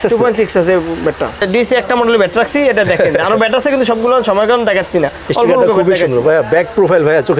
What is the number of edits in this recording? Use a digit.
1